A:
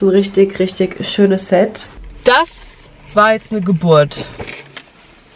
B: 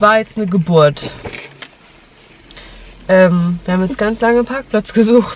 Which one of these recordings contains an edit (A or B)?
A